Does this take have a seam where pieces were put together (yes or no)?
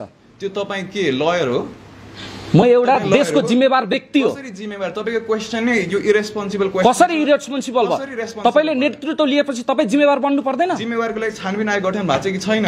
no